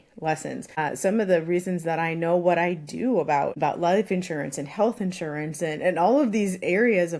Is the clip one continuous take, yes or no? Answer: no